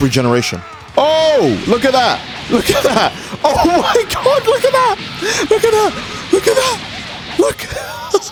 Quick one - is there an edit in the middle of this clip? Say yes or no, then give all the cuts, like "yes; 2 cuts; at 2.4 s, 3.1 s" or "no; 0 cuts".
no; 0 cuts